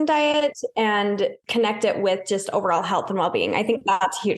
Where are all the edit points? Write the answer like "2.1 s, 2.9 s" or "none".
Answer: 1.4 s